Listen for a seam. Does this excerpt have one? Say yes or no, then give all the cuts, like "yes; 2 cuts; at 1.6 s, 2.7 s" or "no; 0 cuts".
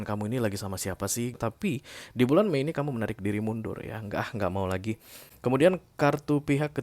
yes; 2 cuts; at 1.3 s, 5.2 s